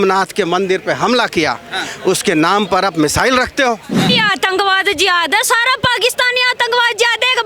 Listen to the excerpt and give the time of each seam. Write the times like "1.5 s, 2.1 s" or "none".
4.1 s

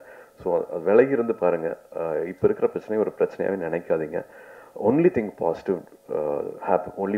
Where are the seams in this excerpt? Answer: none

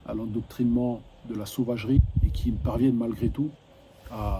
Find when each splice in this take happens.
2.0 s

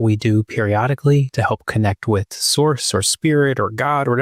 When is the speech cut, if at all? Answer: none

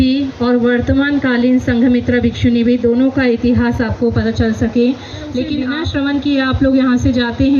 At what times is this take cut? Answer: none

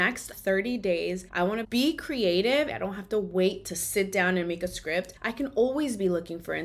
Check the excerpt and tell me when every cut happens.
1.7 s, 2.7 s

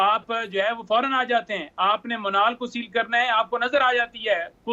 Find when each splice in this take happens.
none

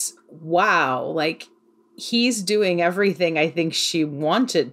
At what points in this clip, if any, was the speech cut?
none

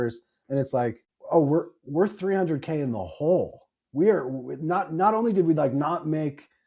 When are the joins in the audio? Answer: 1.1 s

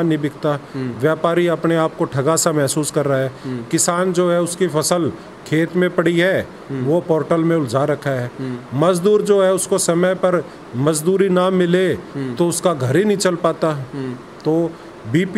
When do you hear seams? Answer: none

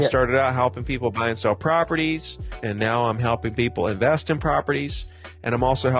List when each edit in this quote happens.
2.6 s

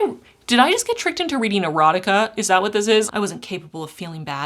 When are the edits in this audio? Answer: 3.1 s

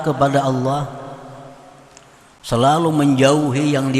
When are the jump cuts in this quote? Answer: none

